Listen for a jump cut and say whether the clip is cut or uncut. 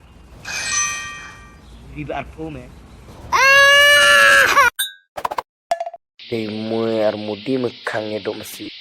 cut